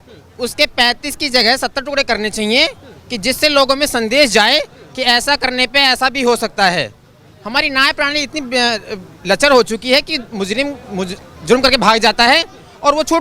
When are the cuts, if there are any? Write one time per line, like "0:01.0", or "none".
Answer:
none